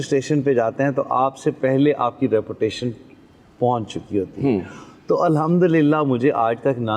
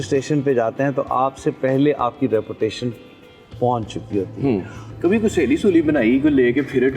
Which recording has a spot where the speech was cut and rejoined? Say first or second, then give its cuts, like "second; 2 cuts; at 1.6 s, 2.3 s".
second; 1 cut; at 4.9 s